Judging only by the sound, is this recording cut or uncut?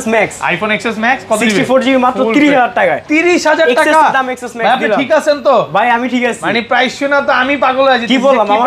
uncut